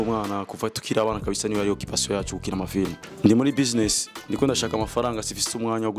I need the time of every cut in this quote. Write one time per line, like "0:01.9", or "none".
0:03.0